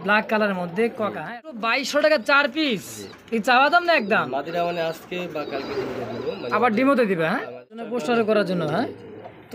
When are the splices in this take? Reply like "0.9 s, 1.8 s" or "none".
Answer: 1.8 s, 8.2 s